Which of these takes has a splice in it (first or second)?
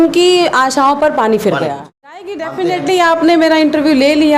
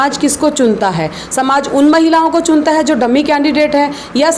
first